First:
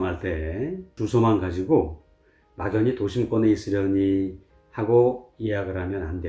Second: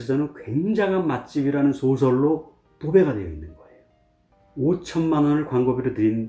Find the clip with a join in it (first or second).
first